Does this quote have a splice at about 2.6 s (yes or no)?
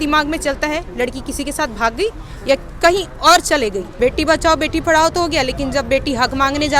no